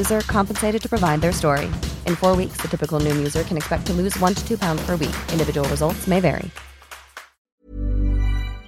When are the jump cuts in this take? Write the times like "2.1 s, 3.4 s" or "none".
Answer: 7.1 s